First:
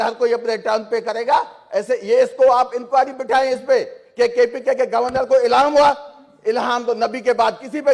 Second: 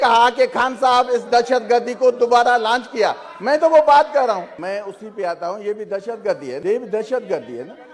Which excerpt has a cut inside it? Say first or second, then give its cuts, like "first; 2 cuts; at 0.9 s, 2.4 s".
second; 2 cuts; at 4.5 s, 6.6 s